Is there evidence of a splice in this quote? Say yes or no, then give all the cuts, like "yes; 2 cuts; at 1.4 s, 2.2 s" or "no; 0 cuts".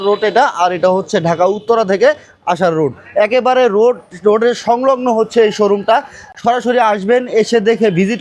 no; 0 cuts